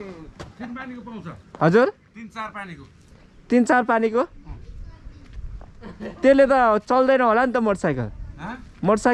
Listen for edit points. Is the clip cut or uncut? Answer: uncut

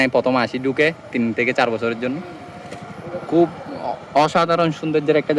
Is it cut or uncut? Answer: uncut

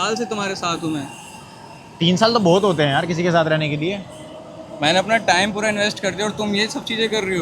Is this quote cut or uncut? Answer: uncut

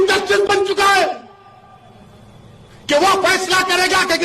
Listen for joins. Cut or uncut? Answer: uncut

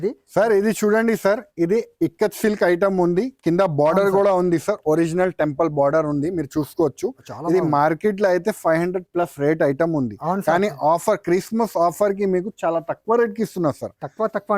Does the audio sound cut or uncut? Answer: uncut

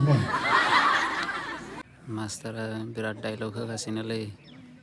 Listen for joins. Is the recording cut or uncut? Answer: cut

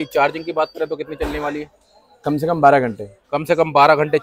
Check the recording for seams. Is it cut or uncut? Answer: uncut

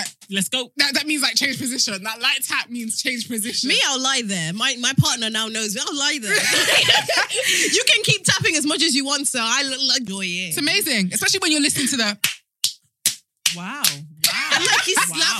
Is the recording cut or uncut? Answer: cut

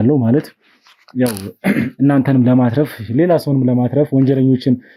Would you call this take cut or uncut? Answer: uncut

